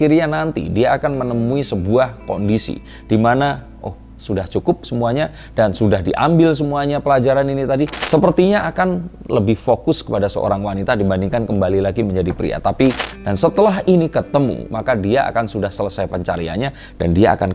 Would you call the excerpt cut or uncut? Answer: cut